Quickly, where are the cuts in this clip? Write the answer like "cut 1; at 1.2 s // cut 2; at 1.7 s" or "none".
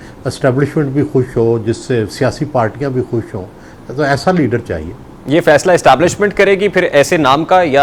none

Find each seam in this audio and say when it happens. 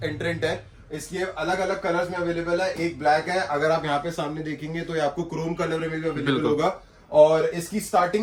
none

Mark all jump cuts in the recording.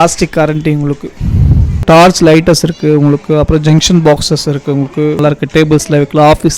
cut 1; at 1.7 s // cut 2; at 5.2 s

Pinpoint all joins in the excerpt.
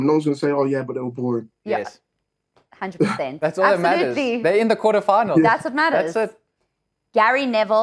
cut 1; at 6.5 s

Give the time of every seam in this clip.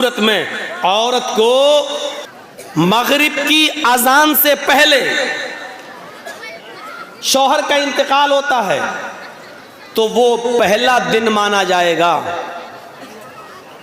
cut 1; at 2.1 s

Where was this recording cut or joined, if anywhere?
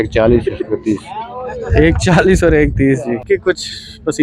cut 1; at 3.2 s

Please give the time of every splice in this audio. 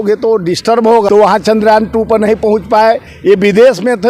cut 1; at 1.1 s

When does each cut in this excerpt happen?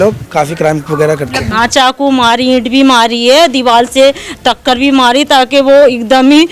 cut 1; at 1.5 s

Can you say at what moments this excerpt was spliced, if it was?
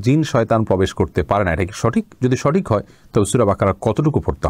none

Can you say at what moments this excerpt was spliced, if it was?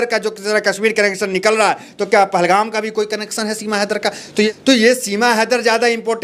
cut 1; at 4.5 s

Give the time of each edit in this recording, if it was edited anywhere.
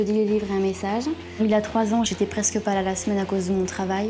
cut 1; at 1.3 s

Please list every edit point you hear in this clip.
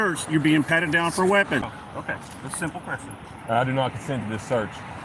cut 1; at 1.6 s

